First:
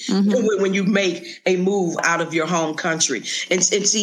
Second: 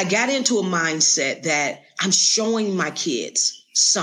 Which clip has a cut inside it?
first; 1 cut; at 2.0 s

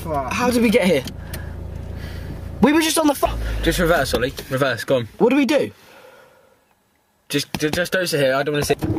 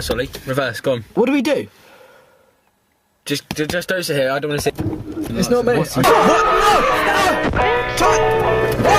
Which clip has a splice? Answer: second; 1 cut; at 6.0 s

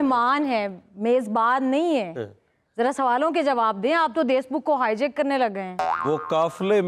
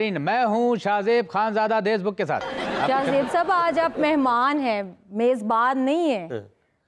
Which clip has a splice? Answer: first; 1 cut; at 5.9 s

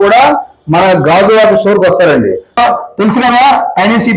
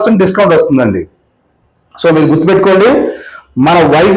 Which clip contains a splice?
first; 1 cut; at 2.6 s

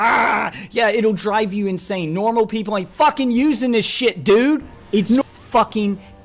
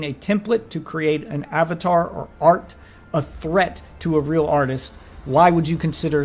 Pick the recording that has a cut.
first; 1 cut; at 5.2 s

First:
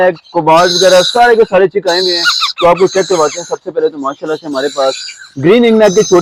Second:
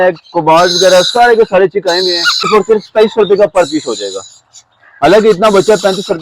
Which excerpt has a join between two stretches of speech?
second; 1 cut; at 2.5 s

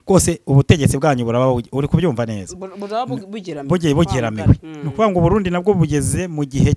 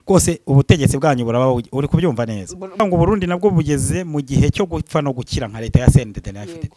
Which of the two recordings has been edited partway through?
second; 1 cut; at 2.8 s

